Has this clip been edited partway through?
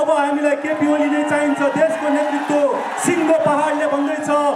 no; 0 cuts

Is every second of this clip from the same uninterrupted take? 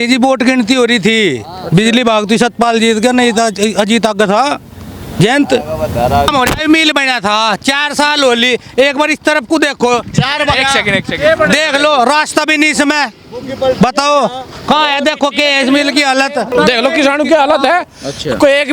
no; 2 cuts; at 6.3 s, 16.5 s

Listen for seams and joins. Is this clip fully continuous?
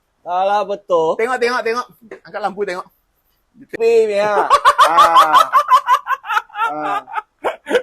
no; 1 cut; at 3.8 s

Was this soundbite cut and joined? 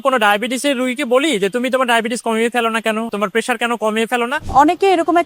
yes; 2 cuts; at 3.1 s, 4.4 s

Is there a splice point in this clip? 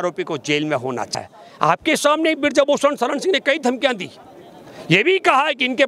yes; 1 cut; at 1.1 s

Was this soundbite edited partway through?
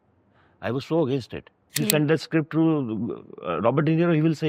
yes; 1 cut; at 1.8 s

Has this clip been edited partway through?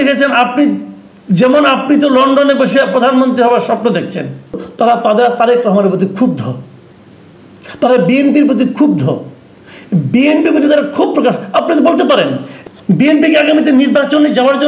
yes; 2 cuts; at 4.6 s, 12.5 s

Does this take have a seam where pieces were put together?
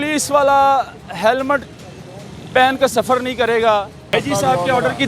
yes; 1 cut; at 4.1 s

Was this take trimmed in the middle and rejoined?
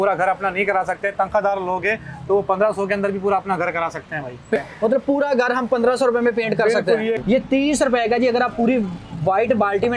yes; 2 cuts; at 4.6 s, 7.2 s

